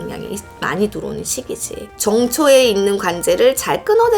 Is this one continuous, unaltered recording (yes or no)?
no